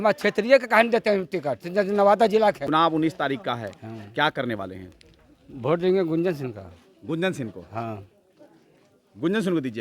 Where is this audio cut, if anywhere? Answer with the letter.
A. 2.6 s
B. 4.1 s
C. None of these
A